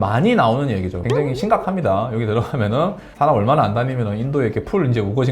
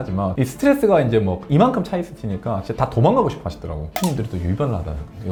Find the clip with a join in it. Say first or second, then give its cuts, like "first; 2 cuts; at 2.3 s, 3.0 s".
first; 1 cut; at 0.9 s